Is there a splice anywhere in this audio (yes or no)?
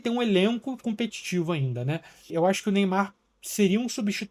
no